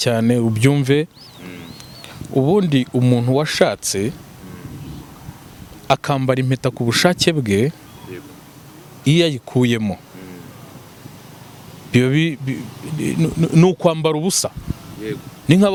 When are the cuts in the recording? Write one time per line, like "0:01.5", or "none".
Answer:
none